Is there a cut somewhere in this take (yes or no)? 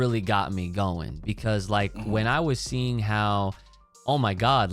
no